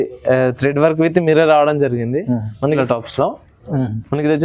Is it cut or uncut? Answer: cut